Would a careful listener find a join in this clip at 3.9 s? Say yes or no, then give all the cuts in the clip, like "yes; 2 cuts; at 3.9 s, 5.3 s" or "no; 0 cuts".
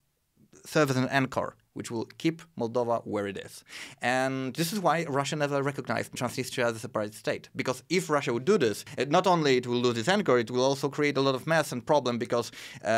no; 2 cuts; at 6.2 s, 8.9 s